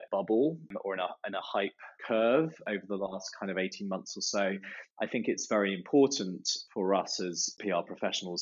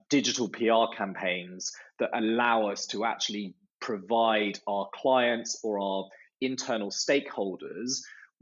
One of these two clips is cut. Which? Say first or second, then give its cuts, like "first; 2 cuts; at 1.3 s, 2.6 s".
first; 1 cut; at 4.9 s